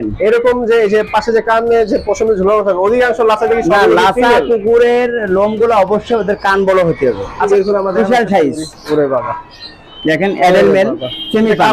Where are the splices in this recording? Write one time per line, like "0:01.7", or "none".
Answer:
0:07.4